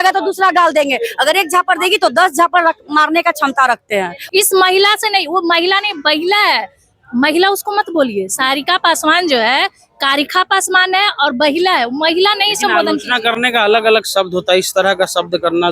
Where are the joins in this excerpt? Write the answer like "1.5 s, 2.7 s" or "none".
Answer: 4.2 s